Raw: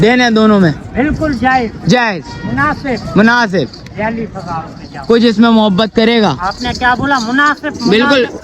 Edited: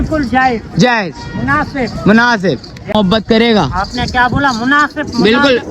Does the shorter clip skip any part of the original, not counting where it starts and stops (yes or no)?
yes